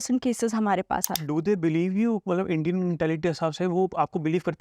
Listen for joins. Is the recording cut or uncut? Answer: cut